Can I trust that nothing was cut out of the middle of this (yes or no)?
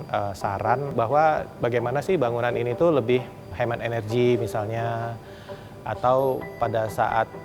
no